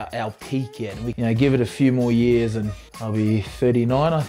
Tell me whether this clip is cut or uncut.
cut